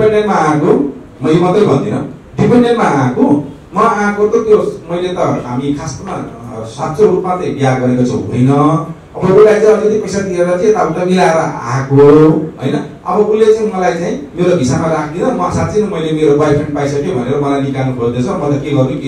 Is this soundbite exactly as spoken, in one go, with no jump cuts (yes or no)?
yes